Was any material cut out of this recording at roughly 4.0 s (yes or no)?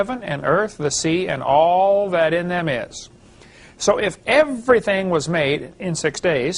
yes